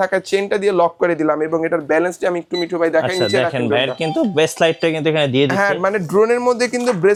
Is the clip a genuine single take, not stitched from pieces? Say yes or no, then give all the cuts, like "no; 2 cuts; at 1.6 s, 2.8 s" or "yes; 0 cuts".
yes; 0 cuts